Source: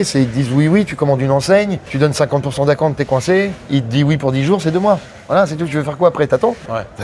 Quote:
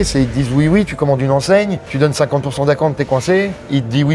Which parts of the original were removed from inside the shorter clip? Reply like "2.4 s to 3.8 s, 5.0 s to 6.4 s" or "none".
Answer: none